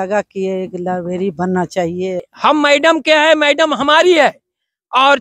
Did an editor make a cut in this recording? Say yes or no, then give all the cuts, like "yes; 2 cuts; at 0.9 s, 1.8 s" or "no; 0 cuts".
yes; 1 cut; at 2.3 s